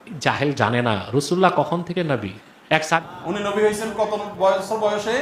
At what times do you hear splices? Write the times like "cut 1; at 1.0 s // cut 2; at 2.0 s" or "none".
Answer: cut 1; at 3.1 s